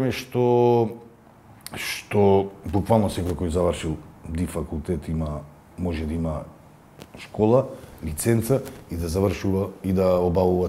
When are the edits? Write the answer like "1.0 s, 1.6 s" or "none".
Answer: none